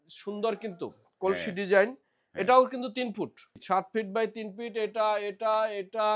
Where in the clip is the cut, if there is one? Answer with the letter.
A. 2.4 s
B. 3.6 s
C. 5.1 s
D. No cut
B